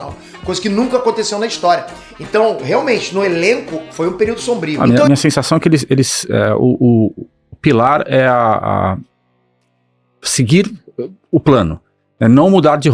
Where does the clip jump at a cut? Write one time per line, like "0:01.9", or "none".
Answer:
0:04.8